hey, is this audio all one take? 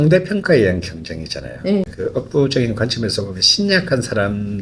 no; 1 cut; at 1.9 s

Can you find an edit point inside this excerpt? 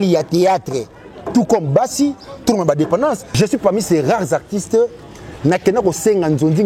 yes; 1 cut; at 3.3 s

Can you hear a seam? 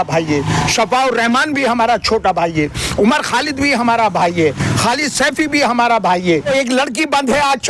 no; 0 cuts

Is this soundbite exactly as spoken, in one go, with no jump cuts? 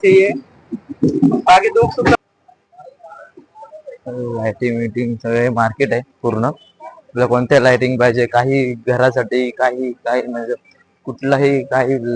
no; 1 cut; at 2.2 s

